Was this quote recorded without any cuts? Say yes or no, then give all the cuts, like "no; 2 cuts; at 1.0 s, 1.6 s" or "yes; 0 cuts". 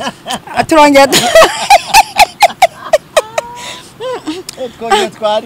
yes; 0 cuts